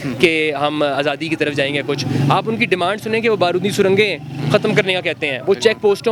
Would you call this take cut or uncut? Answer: uncut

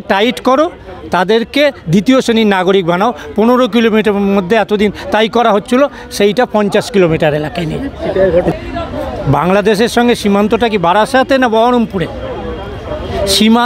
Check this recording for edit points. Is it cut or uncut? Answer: cut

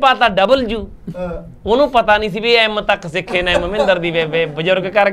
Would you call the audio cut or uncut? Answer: uncut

